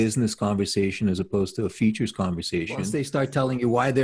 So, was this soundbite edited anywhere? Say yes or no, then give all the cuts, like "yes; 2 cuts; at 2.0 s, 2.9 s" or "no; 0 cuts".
yes; 1 cut; at 2.9 s